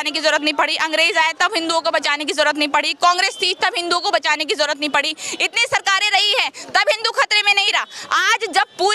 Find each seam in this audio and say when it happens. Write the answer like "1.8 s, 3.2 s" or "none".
none